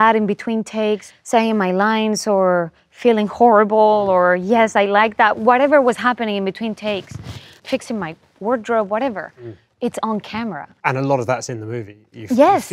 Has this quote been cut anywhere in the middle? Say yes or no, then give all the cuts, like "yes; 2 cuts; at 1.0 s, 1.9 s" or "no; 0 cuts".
yes; 3 cuts; at 1.1 s, 7.5 s, 10.7 s